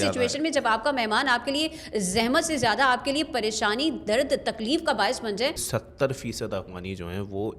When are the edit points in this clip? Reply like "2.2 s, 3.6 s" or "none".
5.6 s